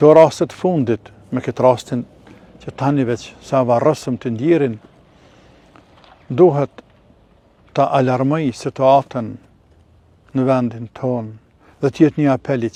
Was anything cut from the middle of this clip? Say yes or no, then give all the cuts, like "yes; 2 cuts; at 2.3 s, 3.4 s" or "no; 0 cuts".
no; 0 cuts